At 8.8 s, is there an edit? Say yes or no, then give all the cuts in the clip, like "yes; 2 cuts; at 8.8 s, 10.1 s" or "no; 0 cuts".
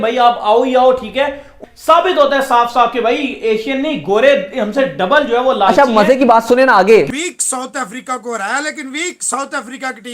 no; 2 cuts; at 1.5 s, 7.1 s